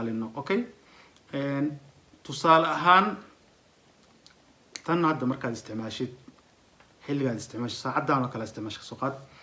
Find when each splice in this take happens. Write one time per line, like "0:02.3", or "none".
none